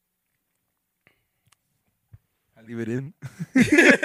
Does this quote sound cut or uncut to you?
uncut